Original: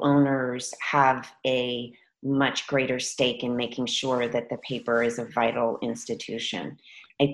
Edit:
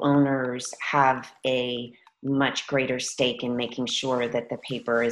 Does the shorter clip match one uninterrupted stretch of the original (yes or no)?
yes